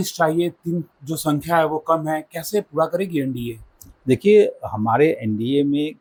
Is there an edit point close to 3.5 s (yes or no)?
no